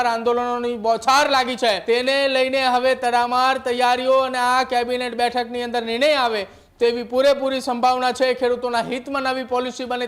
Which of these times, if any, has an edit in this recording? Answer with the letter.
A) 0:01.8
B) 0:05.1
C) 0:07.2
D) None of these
A